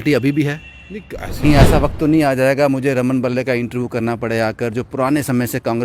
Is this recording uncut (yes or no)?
no